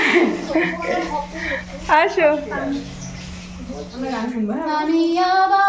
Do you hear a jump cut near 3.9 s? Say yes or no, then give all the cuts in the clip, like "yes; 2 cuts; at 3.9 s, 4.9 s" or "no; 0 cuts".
yes; 1 cut; at 3.9 s